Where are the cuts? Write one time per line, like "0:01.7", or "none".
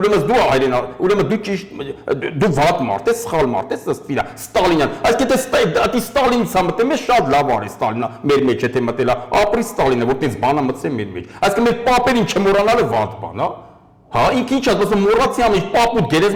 none